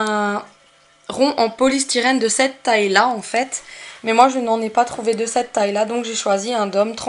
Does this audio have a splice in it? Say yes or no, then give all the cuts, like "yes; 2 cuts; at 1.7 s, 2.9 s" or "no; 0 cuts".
yes; 1 cut; at 1.3 s